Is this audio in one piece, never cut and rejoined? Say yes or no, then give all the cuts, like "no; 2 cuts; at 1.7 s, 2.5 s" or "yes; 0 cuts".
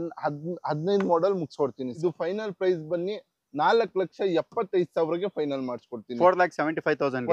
no; 1 cut; at 1.9 s